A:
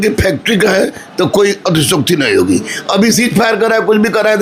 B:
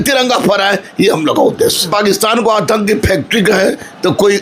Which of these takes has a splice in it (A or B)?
B